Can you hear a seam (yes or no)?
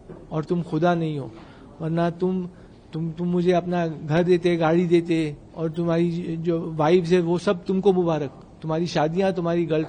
no